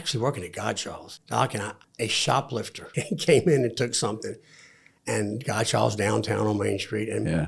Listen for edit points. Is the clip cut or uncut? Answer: cut